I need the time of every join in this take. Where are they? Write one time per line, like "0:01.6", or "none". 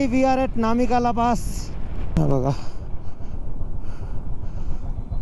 0:02.0